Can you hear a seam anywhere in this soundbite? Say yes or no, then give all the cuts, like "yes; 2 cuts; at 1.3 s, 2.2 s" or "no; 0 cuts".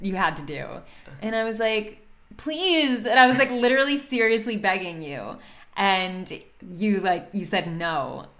no; 0 cuts